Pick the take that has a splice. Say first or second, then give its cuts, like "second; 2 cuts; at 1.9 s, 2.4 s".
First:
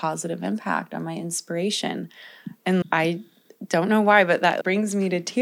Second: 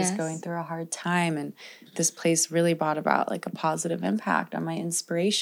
first; 2 cuts; at 2.8 s, 4.6 s